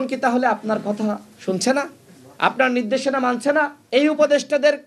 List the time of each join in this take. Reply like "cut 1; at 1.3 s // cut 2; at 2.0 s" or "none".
cut 1; at 3.8 s